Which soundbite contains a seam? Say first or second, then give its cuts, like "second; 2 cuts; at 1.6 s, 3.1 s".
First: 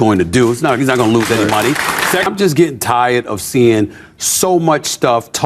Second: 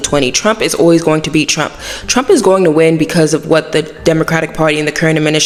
first; 1 cut; at 2.3 s